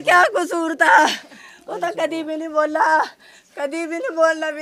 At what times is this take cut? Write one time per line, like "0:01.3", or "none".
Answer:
none